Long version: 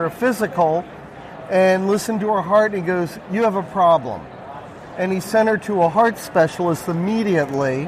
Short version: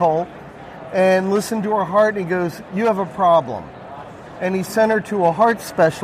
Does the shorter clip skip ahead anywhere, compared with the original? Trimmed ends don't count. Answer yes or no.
no